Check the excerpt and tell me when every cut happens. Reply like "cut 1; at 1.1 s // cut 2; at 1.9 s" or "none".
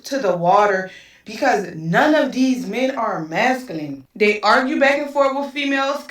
cut 1; at 4.4 s